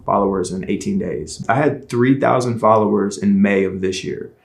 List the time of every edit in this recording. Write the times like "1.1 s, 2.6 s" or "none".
1.4 s